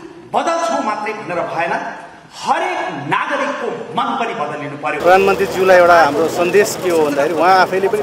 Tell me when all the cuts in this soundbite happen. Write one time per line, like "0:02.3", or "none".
0:05.0